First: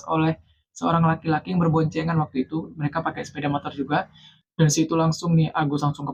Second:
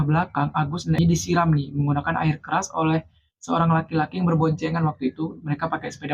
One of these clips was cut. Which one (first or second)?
second